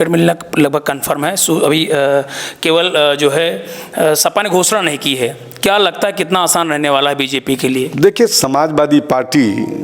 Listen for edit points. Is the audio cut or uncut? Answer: uncut